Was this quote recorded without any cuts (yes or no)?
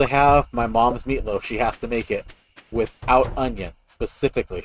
yes